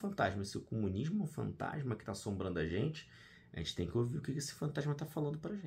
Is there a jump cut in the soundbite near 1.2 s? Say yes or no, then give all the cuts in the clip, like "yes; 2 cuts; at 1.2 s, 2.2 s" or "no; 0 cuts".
no; 0 cuts